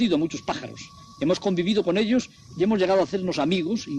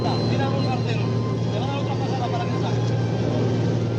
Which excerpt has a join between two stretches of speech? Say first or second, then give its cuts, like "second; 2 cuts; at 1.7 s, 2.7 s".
first; 1 cut; at 2.1 s